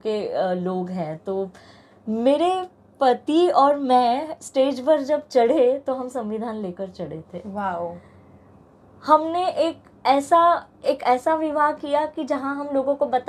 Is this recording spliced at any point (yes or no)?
no